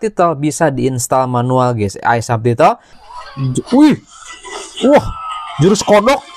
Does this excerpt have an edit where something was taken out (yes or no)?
yes